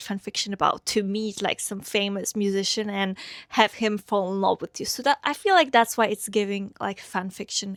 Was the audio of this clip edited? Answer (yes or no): no